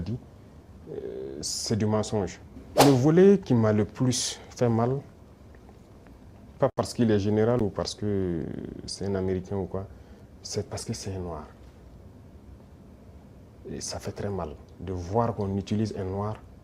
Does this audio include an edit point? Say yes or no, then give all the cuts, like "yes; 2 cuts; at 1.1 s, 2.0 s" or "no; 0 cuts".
yes; 1 cut; at 2.7 s